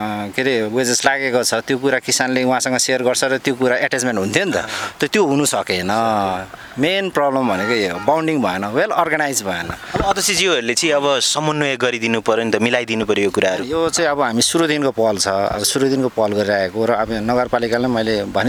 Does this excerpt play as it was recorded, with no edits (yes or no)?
yes